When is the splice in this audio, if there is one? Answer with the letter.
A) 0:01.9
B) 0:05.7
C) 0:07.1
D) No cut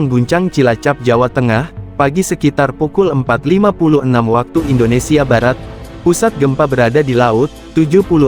B